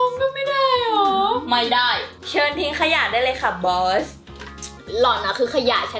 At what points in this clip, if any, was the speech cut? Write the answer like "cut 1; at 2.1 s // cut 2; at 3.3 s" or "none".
cut 1; at 2.1 s